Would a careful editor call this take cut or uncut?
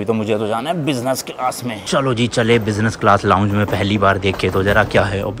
cut